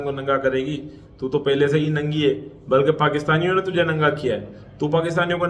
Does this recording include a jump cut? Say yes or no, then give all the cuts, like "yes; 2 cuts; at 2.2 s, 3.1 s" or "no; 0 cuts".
no; 0 cuts